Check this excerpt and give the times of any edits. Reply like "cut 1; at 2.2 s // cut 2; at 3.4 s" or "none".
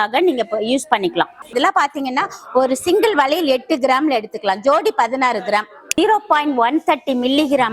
cut 1; at 1.5 s // cut 2; at 5.9 s